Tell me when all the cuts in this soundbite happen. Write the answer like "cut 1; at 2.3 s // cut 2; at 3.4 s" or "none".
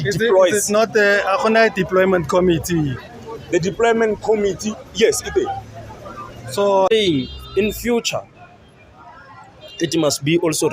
cut 1; at 6.9 s